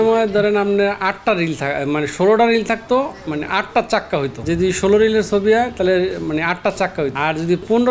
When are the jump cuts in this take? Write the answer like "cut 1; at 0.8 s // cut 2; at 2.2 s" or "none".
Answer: cut 1; at 4.4 s // cut 2; at 7.1 s